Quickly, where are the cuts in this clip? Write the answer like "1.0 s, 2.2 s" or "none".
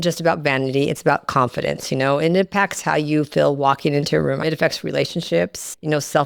4.4 s

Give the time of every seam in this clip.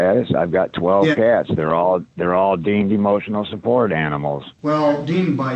4.5 s

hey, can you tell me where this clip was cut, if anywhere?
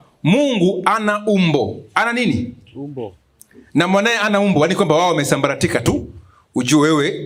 none

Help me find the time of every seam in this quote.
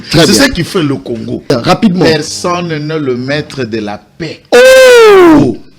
1.5 s

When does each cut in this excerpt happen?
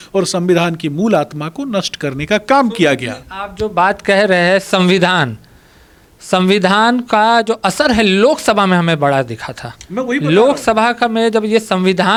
none

